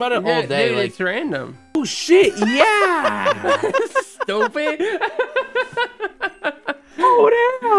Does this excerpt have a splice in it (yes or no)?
yes